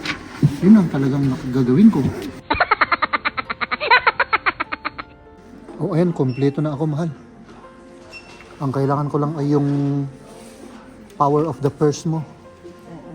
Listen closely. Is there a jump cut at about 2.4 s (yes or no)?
yes